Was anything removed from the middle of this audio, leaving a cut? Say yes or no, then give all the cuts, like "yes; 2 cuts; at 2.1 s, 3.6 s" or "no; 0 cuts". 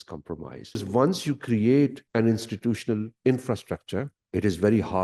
yes; 3 cuts; at 0.8 s, 2.0 s, 4.2 s